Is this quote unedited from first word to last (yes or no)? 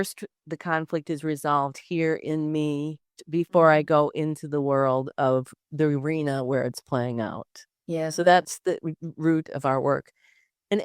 no